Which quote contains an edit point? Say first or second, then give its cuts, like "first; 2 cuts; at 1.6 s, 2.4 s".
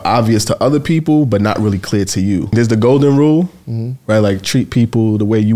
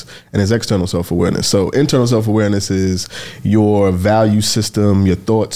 first; 1 cut; at 2.5 s